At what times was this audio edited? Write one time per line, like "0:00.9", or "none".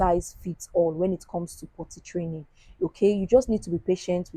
none